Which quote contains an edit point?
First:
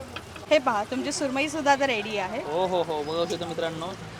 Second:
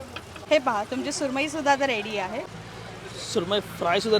second; 1 cut; at 2.5 s

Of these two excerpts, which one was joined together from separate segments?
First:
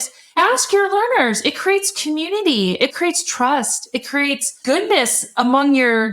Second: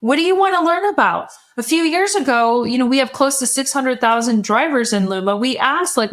first; 1 cut; at 2.9 s

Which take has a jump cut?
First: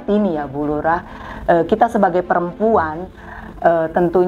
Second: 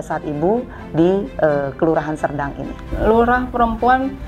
second; 1 cut; at 2.9 s

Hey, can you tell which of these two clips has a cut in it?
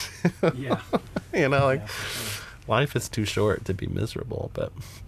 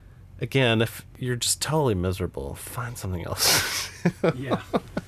second; 1 cut; at 1.0 s

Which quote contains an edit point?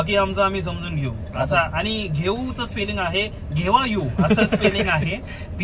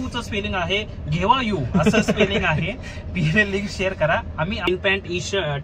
second; 1 cut; at 4.7 s

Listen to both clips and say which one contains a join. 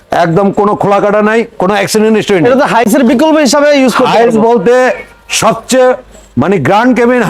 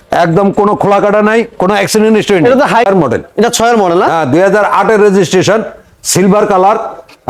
second; 1 cut; at 2.8 s

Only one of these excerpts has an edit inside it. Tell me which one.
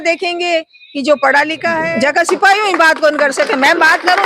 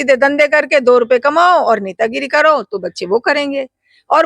first; 1 cut; at 1.8 s

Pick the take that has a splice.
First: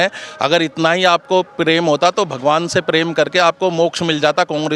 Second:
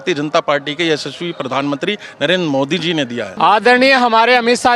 second; 1 cut; at 3.3 s

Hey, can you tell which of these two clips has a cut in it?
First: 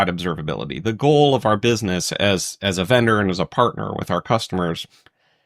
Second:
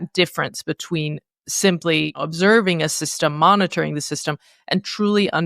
second; 1 cut; at 2.2 s

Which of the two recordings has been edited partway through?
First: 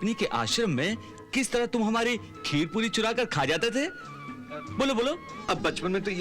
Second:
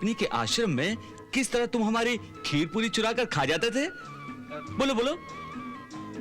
first; 1 cut; at 5.3 s

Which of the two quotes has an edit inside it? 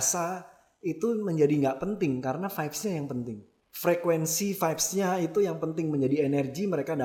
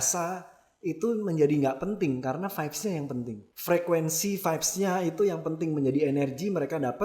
second; 1 cut; at 3.4 s

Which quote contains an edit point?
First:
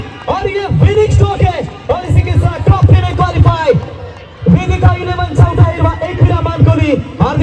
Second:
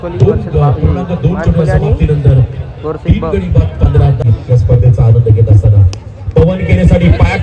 second; 1 cut; at 4.3 s

